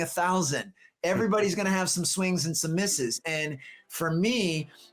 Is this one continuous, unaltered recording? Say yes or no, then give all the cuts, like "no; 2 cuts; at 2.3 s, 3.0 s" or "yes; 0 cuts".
no; 1 cut; at 3.8 s